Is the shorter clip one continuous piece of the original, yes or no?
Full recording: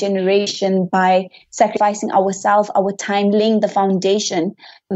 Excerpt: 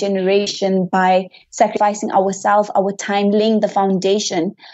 yes